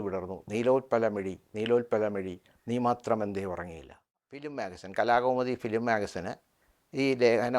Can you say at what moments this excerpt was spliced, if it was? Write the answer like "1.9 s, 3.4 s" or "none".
4.3 s